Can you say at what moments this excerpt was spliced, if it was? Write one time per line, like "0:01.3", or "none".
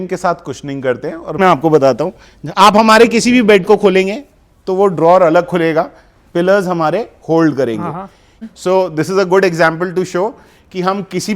0:01.4
0:08.4